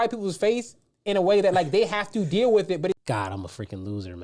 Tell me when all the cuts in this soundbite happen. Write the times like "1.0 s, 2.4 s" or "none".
3.0 s